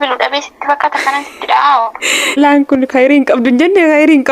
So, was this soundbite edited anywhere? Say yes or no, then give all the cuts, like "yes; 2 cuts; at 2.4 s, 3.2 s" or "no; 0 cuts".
yes; 1 cut; at 2.4 s